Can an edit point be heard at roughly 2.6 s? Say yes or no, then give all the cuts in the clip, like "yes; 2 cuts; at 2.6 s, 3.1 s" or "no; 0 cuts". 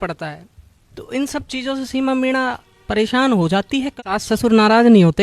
no; 1 cut; at 3.9 s